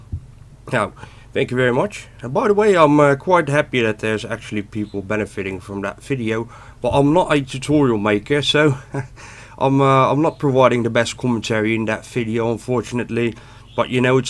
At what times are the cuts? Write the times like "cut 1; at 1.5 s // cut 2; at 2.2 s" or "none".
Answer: cut 1; at 10.5 s